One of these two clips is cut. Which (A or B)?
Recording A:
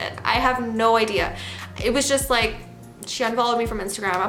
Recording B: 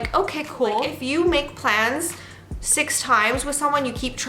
B